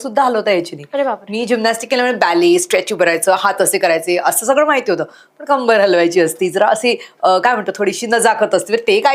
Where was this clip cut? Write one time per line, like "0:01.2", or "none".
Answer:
none